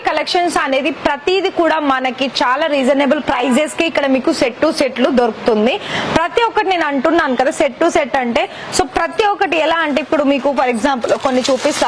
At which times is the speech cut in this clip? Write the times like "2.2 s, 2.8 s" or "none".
none